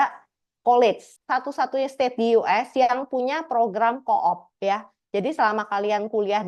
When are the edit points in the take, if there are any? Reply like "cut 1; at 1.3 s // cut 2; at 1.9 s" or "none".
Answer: cut 1; at 1.1 s